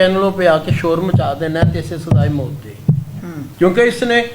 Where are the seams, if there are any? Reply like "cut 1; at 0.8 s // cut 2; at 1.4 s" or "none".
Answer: none